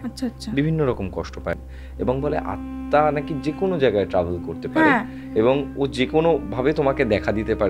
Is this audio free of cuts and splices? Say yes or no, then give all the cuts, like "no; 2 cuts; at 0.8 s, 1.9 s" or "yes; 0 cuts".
no; 1 cut; at 1.6 s